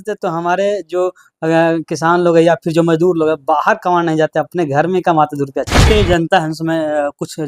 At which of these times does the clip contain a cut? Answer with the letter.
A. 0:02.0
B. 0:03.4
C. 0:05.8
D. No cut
C